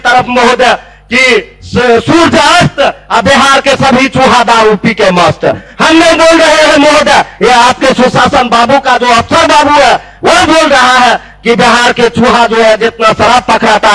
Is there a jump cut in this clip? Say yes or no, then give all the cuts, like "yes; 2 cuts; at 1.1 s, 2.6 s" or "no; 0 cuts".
no; 0 cuts